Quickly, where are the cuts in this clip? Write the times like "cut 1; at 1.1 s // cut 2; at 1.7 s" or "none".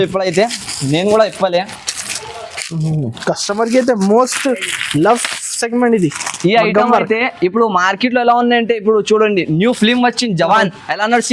none